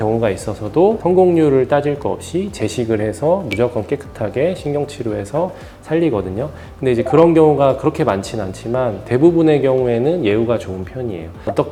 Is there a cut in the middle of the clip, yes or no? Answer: no